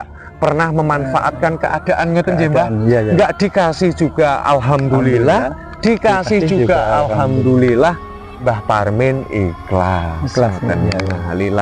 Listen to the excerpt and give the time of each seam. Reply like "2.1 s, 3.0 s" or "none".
none